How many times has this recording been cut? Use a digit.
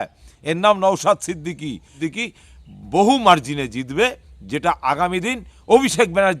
1